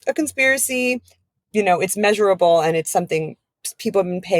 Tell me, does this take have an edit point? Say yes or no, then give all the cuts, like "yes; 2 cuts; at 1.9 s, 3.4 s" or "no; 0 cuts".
yes; 1 cut; at 1.1 s